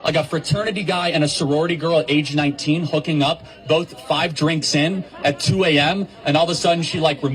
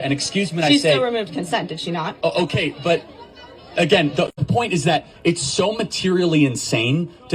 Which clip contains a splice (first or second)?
second